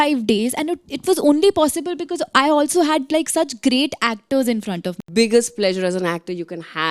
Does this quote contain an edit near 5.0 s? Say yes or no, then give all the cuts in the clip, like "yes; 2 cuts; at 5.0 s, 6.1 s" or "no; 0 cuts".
yes; 1 cut; at 5.0 s